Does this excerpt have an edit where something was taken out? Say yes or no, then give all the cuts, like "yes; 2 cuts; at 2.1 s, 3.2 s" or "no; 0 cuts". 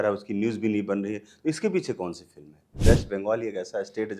yes; 1 cut; at 2.7 s